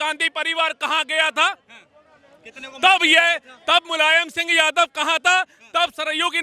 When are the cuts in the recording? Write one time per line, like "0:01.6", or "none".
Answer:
none

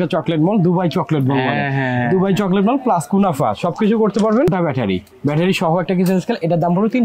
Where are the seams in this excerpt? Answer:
0:04.5

